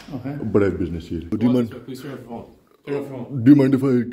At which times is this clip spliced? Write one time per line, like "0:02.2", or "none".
0:01.3

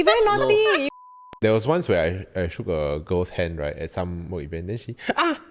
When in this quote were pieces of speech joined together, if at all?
0:00.9

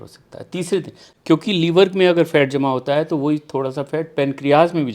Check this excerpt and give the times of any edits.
0:01.0

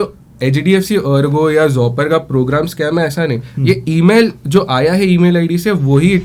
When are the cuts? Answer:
none

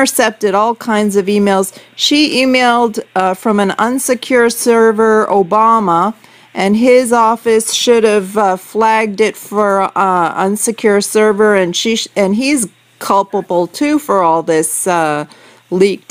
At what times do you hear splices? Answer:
0:12.5

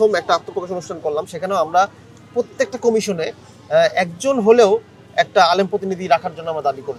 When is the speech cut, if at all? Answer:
none

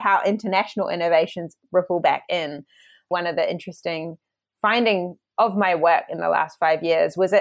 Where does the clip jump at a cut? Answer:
0:03.1
0:05.2

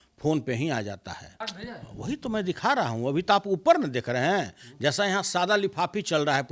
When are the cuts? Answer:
0:01.4

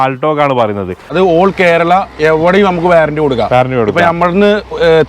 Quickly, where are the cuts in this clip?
0:01.1

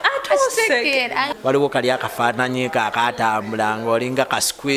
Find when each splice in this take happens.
0:01.3

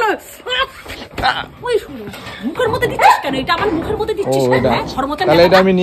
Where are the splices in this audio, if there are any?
none

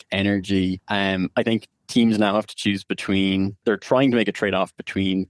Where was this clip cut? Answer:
0:00.8
0:03.6

